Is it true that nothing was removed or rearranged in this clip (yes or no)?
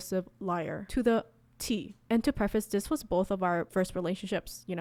yes